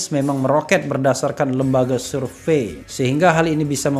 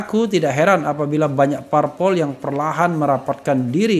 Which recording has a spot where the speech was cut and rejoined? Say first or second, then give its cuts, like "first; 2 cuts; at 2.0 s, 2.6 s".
first; 1 cut; at 2.8 s